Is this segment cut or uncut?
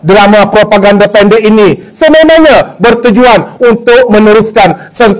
uncut